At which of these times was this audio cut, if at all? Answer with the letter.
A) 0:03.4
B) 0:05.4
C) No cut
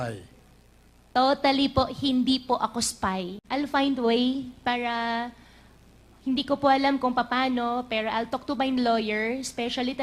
A